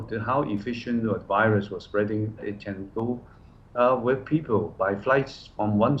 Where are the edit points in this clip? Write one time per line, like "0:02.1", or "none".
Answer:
0:02.4